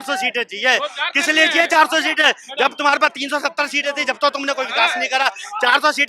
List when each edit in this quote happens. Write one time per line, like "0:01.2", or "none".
none